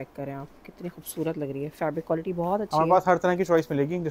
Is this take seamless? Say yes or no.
yes